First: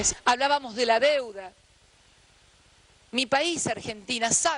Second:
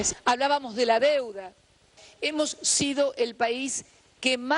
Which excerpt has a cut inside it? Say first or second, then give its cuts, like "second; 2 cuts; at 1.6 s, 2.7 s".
second; 1 cut; at 2.0 s